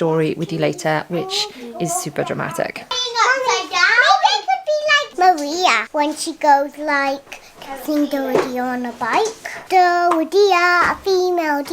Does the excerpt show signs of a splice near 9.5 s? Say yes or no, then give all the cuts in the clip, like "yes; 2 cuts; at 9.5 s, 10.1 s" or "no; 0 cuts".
yes; 4 cuts; at 3.0 s, 5.0 s, 5.8 s, 9.5 s